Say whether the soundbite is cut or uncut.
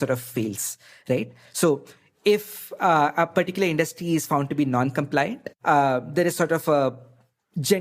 uncut